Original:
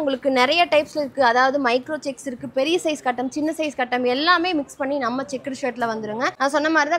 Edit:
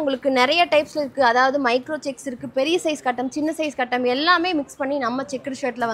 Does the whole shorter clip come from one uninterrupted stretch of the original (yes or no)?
yes